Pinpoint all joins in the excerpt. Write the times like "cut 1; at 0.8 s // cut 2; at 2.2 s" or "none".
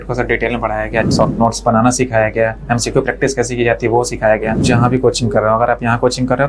cut 1; at 1.1 s // cut 2; at 4.6 s

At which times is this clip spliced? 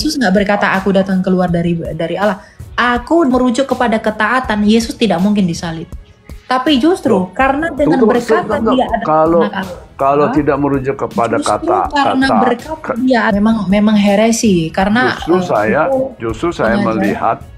cut 1; at 3.3 s // cut 2; at 13.3 s

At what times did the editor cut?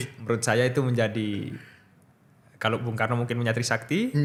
none

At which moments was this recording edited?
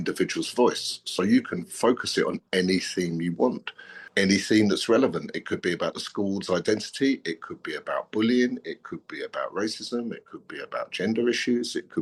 none

